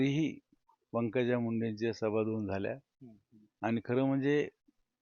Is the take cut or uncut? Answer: uncut